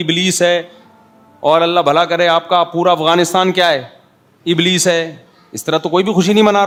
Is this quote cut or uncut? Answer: uncut